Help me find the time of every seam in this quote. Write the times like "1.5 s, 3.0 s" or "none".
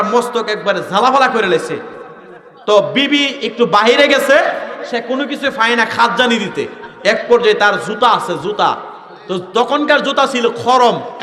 none